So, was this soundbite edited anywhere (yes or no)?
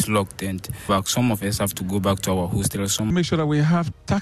yes